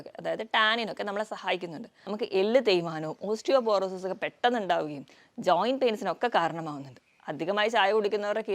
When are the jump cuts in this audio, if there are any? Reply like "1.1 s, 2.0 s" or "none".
1.9 s